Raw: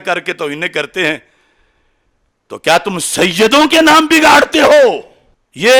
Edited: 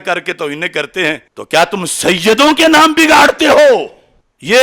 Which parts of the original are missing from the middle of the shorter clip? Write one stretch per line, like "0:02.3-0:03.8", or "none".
0:01.3-0:02.5

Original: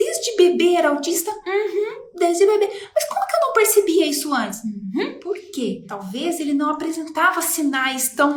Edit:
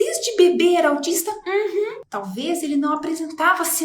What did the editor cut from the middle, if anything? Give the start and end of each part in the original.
0:02.1-0:05.8

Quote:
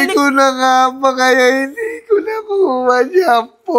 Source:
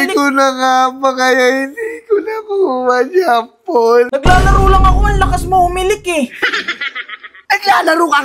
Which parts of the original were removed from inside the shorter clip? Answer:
none

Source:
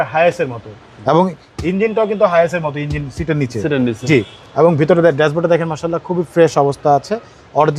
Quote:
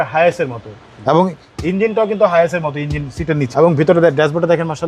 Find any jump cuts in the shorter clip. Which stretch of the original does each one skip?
0:03.5-0:04.5

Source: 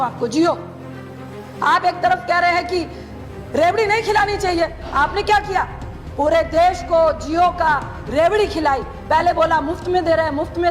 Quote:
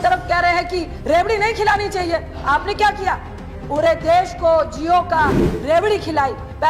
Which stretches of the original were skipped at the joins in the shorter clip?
0:02.9-0:03.4

